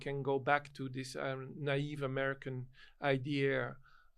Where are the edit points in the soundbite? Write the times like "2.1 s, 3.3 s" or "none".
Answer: none